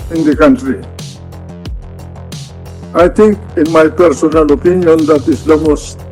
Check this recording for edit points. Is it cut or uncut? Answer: cut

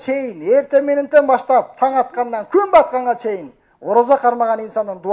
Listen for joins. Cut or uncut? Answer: uncut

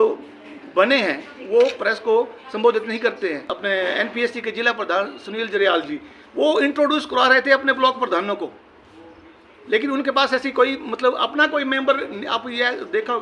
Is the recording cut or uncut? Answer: cut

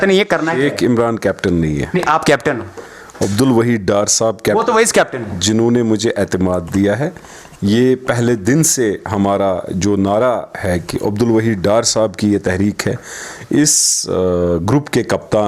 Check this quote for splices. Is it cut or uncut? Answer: uncut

